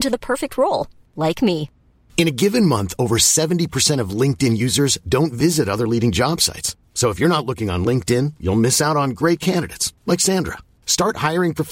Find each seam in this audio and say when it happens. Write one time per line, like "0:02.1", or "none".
none